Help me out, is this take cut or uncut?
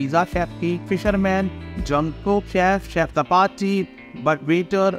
uncut